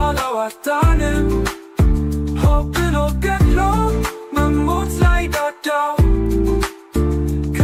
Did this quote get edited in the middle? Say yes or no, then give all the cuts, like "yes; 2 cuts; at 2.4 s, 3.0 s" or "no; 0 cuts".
no; 0 cuts